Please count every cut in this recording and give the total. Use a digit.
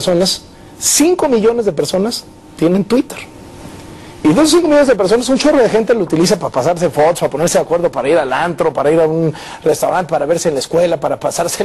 1